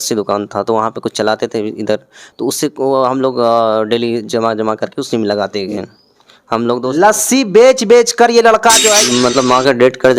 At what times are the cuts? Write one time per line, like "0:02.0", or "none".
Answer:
0:09.0